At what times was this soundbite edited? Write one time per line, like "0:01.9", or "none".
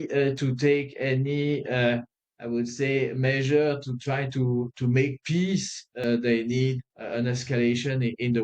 0:06.0
0:06.9

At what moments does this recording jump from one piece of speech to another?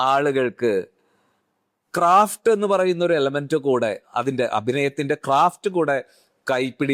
none

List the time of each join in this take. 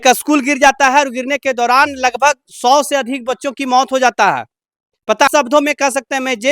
0:05.3

